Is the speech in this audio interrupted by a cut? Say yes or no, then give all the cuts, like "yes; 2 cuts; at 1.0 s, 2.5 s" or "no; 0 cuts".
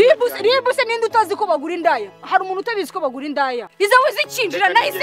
yes; 1 cut; at 3.7 s